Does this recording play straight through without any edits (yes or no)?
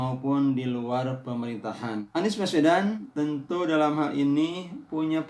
no